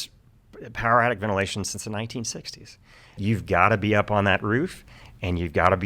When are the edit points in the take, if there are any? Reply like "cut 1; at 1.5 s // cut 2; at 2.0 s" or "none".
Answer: cut 1; at 3.2 s